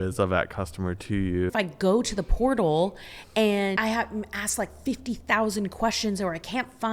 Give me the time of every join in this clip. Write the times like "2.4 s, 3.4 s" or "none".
1.5 s, 3.8 s